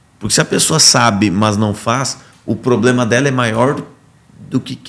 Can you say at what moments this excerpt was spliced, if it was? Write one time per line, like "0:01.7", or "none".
none